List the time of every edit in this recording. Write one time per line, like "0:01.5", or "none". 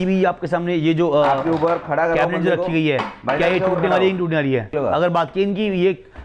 none